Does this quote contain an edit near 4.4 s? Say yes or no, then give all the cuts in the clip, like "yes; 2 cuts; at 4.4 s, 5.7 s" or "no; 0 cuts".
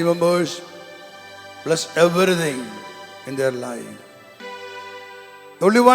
yes; 1 cut; at 4.4 s